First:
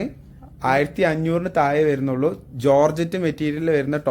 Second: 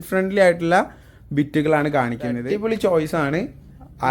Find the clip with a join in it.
second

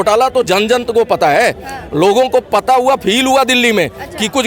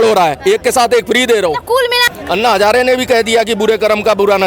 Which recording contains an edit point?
second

